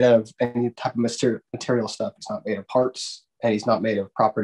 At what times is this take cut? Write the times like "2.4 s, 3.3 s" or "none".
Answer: 3.2 s